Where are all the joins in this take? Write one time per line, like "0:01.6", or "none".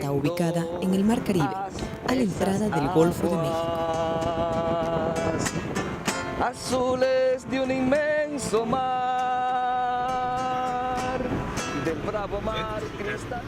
0:04.1

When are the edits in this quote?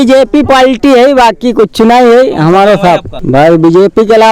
0:03.1

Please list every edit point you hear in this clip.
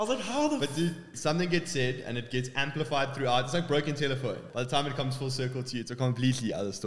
0:01.1
0:04.4

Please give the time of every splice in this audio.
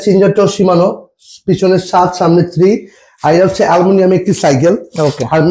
none

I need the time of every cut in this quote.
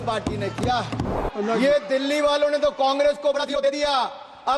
0:01.2

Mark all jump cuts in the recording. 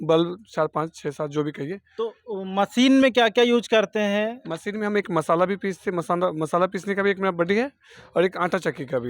none

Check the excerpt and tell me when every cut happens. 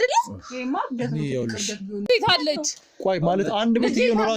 0:02.1

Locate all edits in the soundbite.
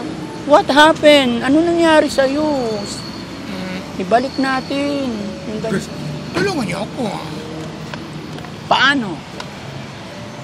none

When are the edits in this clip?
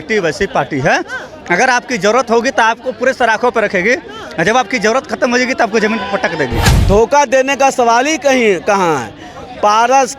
0:06.6

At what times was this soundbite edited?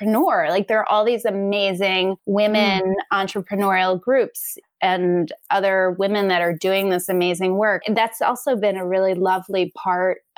0:02.2
0:07.8

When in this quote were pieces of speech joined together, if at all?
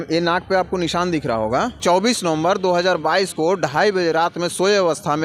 0:01.8

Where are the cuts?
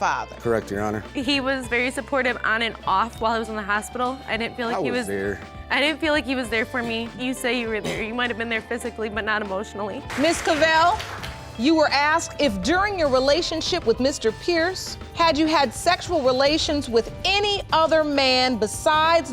0:01.1
0:10.1

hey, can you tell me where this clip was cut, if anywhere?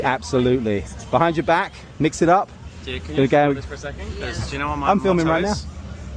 0:01.8

